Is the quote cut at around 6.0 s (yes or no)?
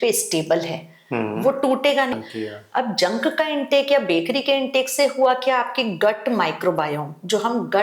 no